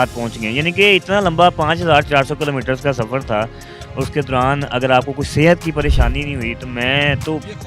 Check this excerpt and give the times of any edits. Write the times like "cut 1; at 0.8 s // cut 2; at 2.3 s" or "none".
none